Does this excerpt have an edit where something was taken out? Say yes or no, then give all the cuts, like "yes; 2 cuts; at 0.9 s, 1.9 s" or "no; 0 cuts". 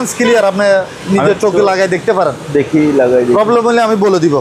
no; 0 cuts